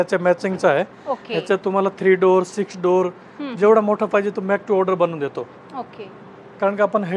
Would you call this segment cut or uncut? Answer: uncut